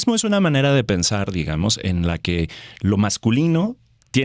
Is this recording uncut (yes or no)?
yes